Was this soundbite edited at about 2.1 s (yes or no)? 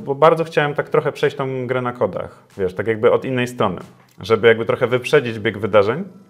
no